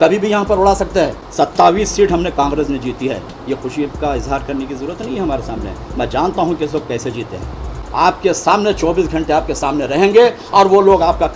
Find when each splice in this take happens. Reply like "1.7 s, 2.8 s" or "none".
1.2 s, 7.8 s

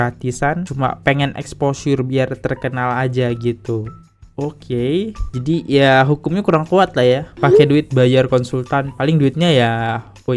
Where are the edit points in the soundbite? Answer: 7.3 s

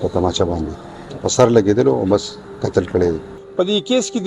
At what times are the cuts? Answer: 3.3 s

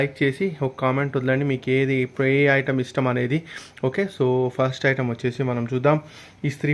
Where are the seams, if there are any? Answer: none

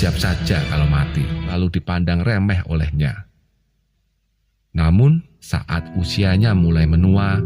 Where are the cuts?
1.5 s

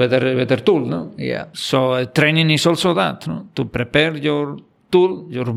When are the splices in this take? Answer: 1.5 s

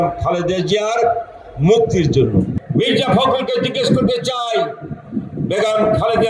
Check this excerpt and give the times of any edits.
2.6 s

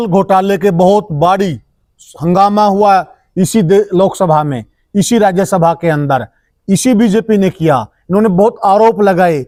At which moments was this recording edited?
none

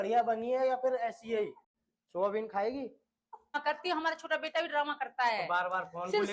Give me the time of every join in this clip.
3.5 s

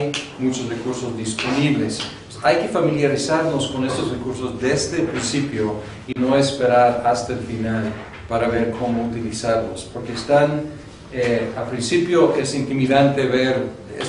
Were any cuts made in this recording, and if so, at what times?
2.7 s

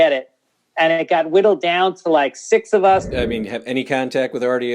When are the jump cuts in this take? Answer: 3.1 s

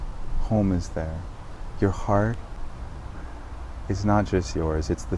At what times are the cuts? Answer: none

